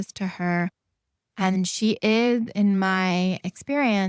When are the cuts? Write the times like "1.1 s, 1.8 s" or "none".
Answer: none